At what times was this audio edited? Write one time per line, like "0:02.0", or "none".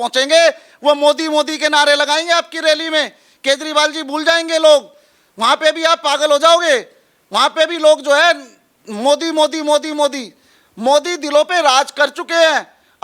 none

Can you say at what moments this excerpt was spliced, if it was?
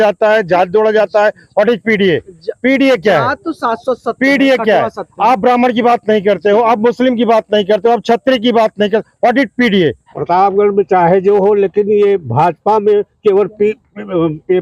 0:10.1

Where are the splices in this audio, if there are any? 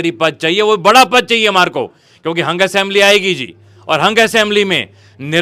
none

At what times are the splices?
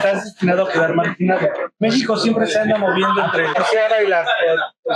0:02.0
0:03.6

